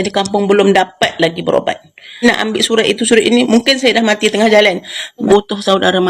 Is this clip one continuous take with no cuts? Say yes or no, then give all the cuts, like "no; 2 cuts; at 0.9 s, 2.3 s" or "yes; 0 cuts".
no; 2 cuts; at 2.2 s, 5.3 s